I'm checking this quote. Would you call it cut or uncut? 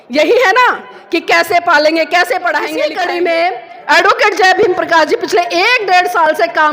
cut